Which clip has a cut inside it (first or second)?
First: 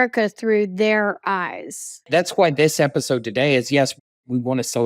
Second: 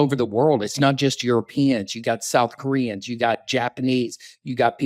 first